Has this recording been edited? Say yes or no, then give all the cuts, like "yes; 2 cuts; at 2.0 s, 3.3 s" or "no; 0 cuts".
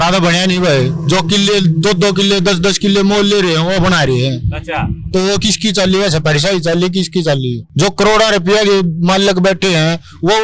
yes; 1 cut; at 7.6 s